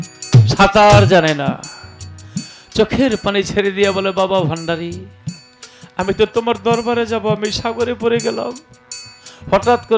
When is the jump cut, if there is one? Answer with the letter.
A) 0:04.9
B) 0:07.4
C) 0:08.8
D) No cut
D